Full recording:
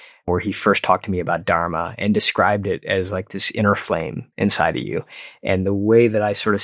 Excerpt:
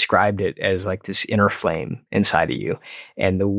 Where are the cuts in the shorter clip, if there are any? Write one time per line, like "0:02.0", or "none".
none